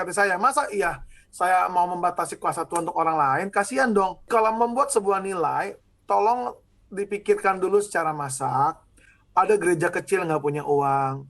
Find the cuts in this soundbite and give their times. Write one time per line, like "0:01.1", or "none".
0:04.2